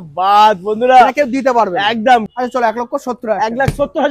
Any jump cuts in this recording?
yes; 1 cut; at 2.3 s

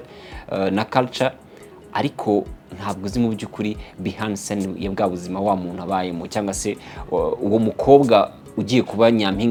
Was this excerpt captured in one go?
yes; 0 cuts

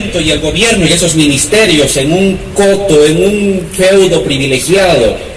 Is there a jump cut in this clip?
no; 0 cuts

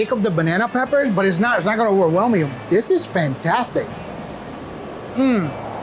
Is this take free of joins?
yes; 0 cuts

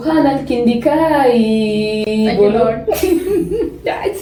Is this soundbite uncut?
yes; 0 cuts

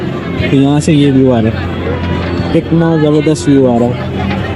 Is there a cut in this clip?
no; 0 cuts

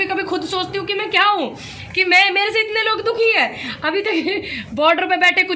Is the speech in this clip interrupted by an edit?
no; 0 cuts

